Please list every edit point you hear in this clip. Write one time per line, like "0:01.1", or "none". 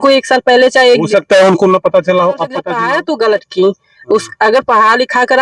0:02.7